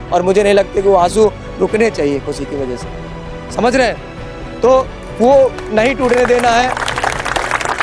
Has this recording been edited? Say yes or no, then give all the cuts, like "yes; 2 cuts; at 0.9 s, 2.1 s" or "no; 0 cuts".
no; 0 cuts